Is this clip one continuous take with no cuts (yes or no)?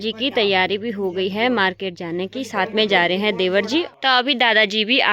no